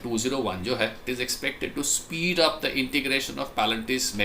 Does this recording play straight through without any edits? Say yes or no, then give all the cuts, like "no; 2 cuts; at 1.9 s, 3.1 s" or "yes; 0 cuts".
no; 1 cut; at 1.0 s